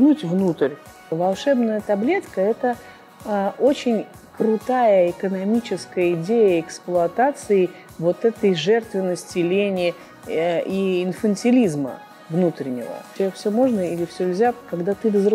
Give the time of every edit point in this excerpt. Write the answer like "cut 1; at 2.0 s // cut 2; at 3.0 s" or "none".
cut 1; at 1.0 s // cut 2; at 13.1 s